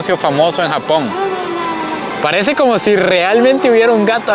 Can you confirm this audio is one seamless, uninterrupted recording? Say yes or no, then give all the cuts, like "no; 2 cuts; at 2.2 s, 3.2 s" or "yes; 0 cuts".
yes; 0 cuts